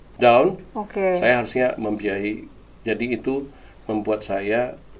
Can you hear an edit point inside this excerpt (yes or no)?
no